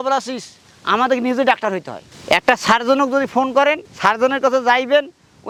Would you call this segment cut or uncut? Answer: uncut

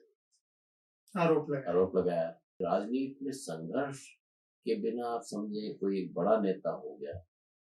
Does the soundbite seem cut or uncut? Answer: cut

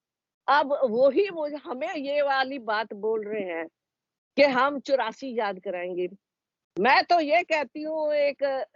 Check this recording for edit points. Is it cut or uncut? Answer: uncut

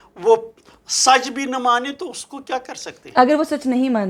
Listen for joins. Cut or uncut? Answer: uncut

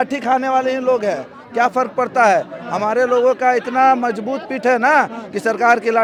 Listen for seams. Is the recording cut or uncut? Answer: uncut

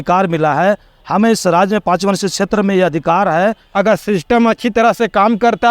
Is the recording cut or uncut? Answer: cut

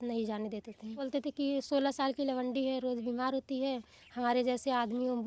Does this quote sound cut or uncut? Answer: cut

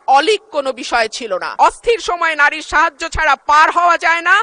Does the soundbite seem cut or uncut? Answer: cut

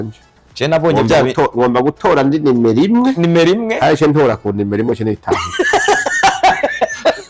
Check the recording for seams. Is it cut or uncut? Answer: uncut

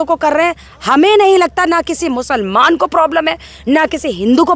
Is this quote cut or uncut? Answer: uncut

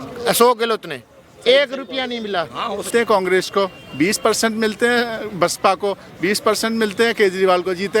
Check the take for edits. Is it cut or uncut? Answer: cut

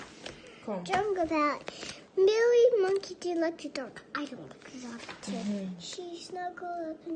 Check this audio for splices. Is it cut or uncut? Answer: uncut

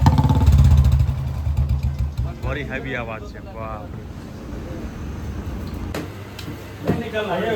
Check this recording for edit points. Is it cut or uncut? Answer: cut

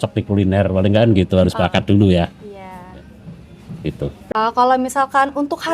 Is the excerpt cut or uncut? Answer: cut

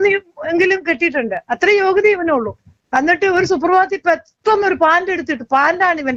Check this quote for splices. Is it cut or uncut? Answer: uncut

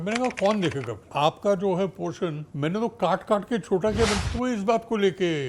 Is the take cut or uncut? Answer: cut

